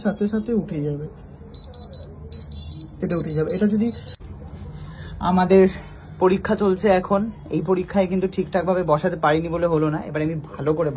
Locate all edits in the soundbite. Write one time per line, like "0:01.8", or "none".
0:04.1